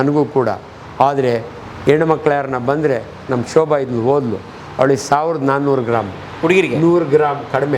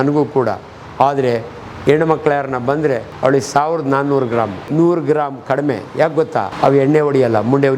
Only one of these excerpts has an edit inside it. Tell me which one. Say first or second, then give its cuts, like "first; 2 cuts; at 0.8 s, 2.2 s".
second; 3 cuts; at 3.1 s, 4.7 s, 6.5 s